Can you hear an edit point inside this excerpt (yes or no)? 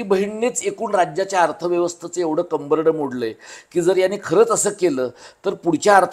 no